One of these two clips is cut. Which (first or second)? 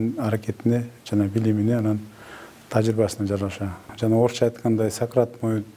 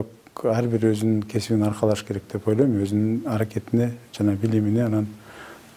first